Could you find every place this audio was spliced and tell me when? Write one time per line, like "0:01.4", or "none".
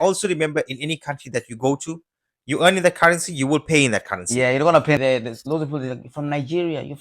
0:05.0